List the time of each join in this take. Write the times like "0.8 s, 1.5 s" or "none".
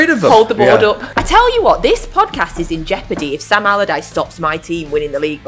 1.1 s